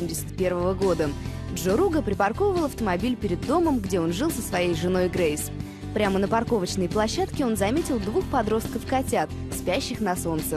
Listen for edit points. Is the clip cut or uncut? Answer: cut